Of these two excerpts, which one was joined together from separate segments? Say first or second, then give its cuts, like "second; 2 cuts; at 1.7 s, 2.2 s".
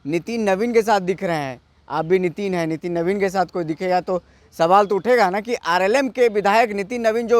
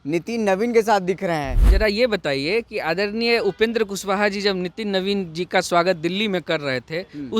second; 1 cut; at 1.6 s